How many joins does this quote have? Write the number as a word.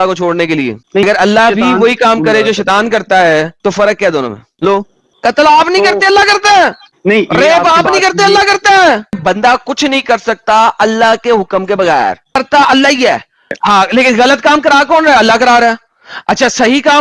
four